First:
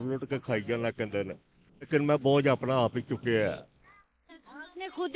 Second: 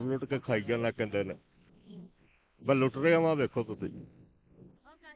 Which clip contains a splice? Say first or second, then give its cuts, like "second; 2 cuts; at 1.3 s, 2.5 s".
first; 1 cut; at 1.9 s